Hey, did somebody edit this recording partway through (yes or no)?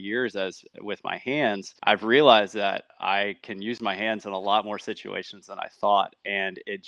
no